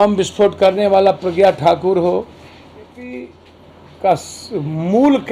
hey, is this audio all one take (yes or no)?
no